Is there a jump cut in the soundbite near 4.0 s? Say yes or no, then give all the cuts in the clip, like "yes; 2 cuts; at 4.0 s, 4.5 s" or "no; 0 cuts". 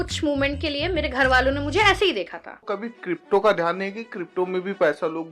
no; 1 cut; at 2.6 s